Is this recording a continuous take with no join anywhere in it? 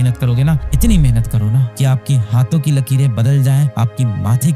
yes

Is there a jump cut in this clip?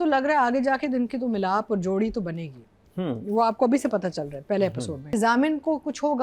yes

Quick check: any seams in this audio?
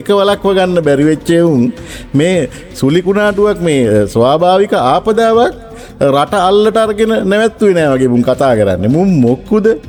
no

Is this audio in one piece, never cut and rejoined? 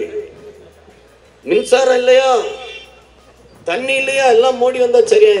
yes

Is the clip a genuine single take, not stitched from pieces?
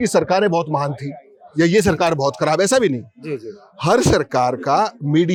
yes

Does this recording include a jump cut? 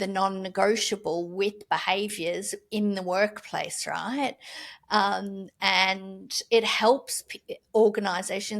no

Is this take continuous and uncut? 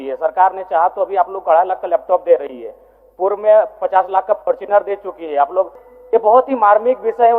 no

